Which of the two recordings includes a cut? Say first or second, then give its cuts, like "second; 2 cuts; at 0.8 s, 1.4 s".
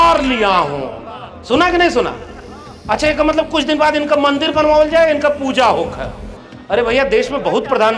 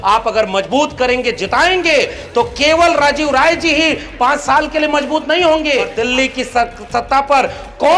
second; 1 cut; at 5.9 s